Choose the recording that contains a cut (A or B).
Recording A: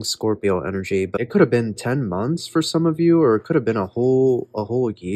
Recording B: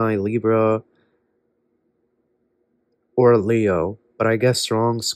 A